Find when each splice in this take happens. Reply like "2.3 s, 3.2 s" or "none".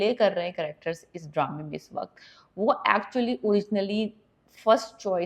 none

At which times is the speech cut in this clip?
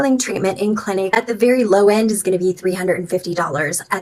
none

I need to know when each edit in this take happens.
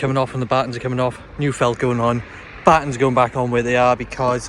none

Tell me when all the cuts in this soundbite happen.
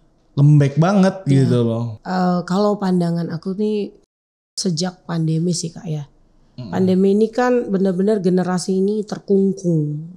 1.9 s

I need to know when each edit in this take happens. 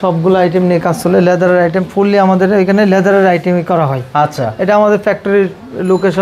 none

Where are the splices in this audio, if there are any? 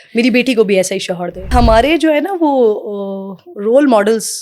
1.5 s

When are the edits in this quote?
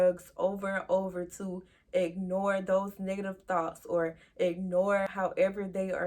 5.1 s

